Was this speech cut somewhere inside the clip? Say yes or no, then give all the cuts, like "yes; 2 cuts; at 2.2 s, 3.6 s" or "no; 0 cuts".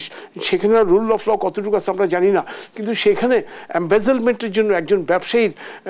no; 0 cuts